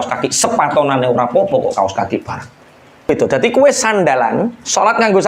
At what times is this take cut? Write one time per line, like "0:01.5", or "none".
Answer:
0:03.1